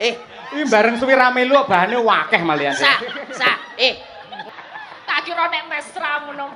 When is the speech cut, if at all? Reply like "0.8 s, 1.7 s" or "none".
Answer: 4.4 s